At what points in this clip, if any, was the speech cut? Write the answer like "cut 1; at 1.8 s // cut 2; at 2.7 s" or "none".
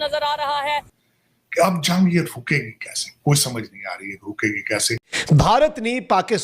cut 1; at 0.9 s // cut 2; at 5.1 s

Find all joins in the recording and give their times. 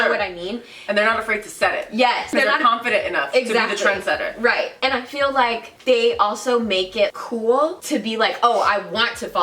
cut 1; at 2.3 s // cut 2; at 7.1 s // cut 3; at 7.8 s

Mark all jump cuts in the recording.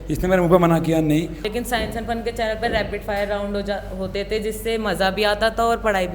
cut 1; at 1.4 s

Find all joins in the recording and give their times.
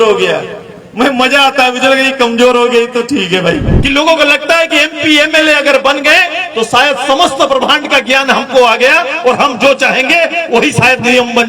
cut 1; at 3.7 s

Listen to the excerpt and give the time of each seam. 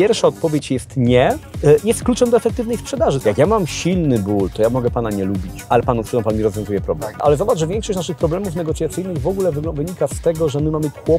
cut 1; at 1.5 s // cut 2; at 3.2 s // cut 3; at 5.5 s // cut 4; at 7.2 s

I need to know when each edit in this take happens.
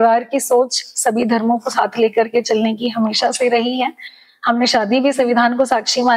none

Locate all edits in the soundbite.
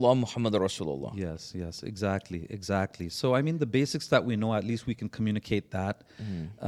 none

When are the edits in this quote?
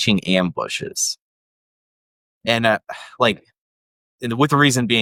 none

